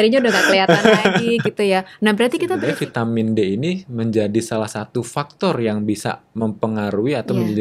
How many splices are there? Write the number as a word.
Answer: one